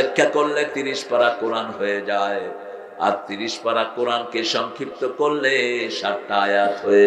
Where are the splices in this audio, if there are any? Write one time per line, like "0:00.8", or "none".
none